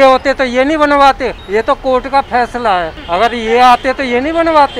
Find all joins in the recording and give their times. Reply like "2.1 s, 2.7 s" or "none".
1.3 s, 3.0 s